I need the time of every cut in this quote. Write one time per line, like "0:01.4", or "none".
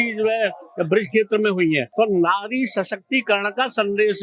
0:01.9